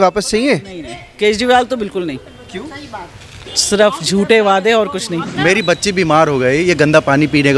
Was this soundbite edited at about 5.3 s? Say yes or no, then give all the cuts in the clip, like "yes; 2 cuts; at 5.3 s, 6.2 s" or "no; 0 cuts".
yes; 1 cut; at 5.3 s